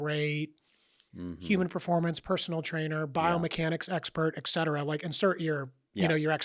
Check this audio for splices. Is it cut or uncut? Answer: uncut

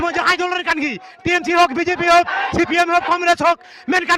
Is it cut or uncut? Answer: uncut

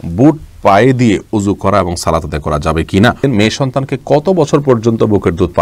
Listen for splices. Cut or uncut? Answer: cut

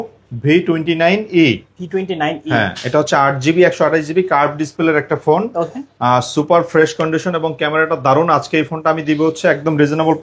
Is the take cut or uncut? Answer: uncut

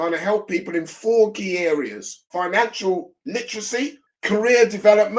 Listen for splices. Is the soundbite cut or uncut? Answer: cut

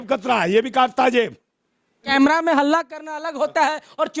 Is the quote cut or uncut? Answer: cut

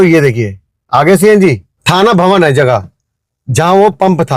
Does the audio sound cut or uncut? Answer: cut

